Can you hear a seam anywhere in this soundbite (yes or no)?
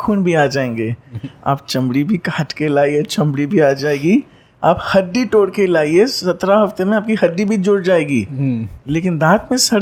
no